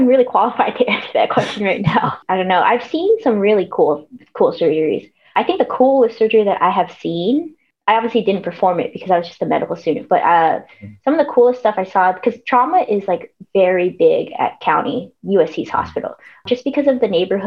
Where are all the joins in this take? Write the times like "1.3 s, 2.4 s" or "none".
2.2 s